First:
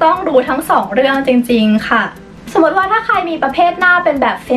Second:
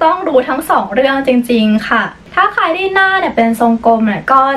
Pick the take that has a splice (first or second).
second